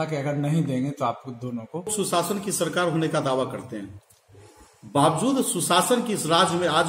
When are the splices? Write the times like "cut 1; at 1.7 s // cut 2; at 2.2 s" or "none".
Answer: cut 1; at 1.9 s